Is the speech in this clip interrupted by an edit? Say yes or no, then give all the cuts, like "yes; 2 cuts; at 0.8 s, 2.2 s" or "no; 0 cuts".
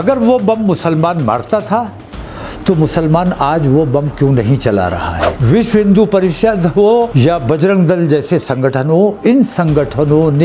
yes; 2 cuts; at 5.3 s, 7.1 s